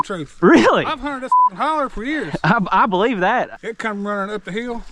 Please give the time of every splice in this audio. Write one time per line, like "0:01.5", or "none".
0:03.5